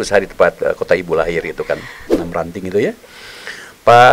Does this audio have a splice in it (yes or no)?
yes